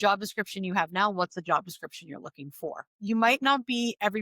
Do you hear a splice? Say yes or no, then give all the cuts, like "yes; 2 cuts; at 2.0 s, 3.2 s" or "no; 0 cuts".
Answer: yes; 1 cut; at 3.0 s